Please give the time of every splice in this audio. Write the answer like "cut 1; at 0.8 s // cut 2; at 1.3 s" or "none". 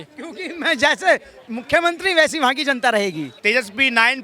cut 1; at 3.3 s